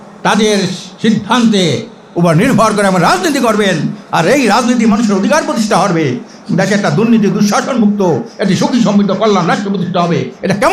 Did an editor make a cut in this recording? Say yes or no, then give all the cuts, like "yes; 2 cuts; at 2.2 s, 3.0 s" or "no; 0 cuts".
no; 0 cuts